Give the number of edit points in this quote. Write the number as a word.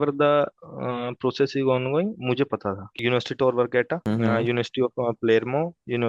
two